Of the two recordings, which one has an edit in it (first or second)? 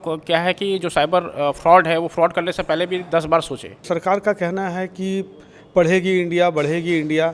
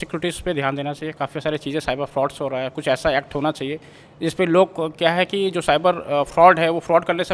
first